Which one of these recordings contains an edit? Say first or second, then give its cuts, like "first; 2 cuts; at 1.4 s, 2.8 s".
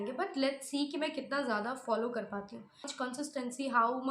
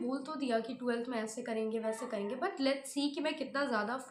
first; 1 cut; at 2.9 s